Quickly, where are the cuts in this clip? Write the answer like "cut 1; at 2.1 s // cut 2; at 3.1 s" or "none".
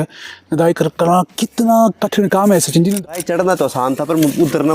cut 1; at 2.9 s

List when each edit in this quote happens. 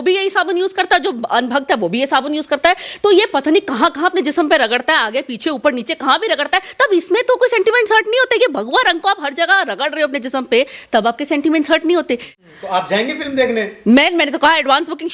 cut 1; at 12.3 s

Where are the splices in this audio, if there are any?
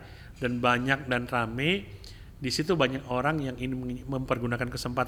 none

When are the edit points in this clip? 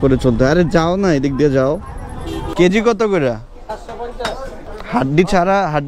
cut 1; at 2.4 s // cut 2; at 4.6 s

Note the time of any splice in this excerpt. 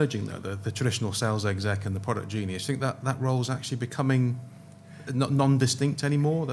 none

